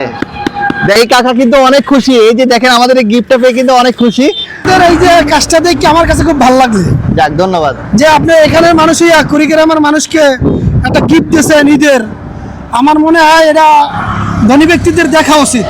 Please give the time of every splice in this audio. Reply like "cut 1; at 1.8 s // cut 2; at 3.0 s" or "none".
cut 1; at 1.0 s // cut 2; at 4.6 s